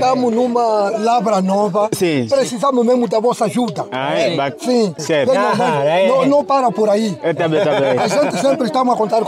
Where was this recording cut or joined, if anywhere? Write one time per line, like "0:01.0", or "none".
none